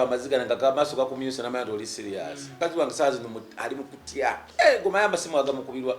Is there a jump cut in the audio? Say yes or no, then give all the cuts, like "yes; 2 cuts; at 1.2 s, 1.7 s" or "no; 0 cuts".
yes; 2 cuts; at 2.5 s, 4.4 s